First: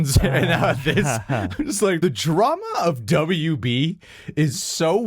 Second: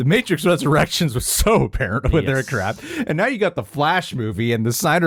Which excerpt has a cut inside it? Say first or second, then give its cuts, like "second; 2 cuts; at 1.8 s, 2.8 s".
first; 1 cut; at 2.0 s